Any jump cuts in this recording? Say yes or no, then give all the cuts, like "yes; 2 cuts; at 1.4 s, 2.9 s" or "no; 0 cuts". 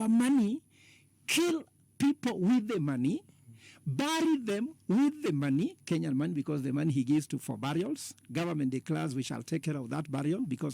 no; 0 cuts